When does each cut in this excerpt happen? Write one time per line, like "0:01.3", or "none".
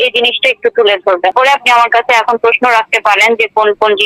0:01.3